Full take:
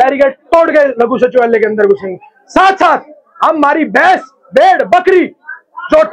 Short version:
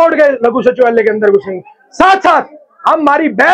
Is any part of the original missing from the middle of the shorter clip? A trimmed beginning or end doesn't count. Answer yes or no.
no